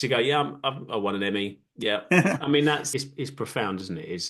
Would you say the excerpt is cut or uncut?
cut